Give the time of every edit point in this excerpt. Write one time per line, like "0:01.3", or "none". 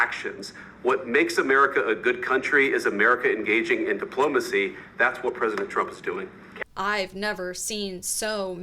0:06.5